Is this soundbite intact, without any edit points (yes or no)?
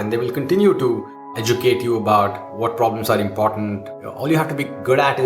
no